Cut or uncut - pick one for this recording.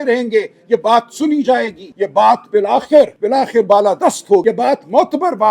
cut